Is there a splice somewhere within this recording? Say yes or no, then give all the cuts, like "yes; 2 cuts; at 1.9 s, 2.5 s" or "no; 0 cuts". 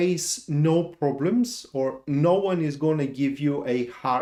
no; 0 cuts